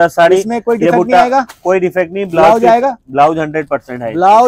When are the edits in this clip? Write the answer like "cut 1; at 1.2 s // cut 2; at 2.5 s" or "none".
none